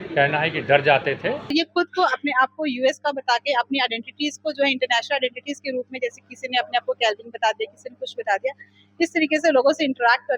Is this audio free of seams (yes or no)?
no